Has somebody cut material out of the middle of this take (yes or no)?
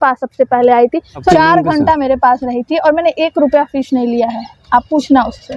yes